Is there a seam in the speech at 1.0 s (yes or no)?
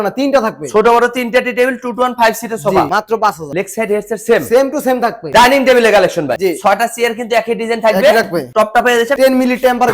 no